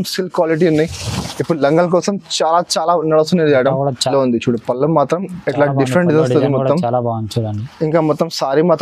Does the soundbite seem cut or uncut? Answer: cut